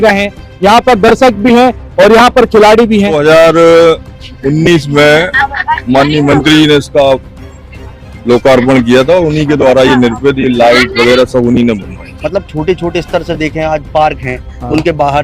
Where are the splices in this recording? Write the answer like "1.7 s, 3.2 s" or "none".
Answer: 3.2 s, 12.1 s